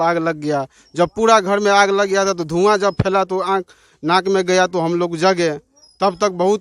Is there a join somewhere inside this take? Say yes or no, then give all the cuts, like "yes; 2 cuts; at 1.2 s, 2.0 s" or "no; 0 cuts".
no; 0 cuts